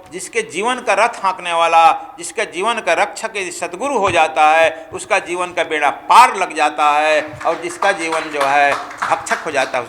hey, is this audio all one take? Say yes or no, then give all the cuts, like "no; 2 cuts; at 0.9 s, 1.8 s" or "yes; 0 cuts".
yes; 0 cuts